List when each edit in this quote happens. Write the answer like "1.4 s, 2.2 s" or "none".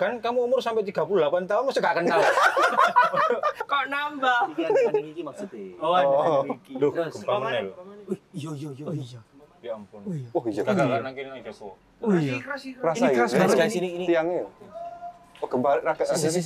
3.6 s